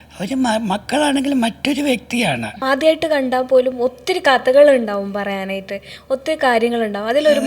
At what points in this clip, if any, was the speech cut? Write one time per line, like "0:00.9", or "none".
0:02.6